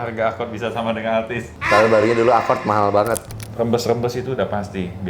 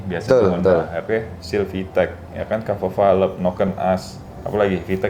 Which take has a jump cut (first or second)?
first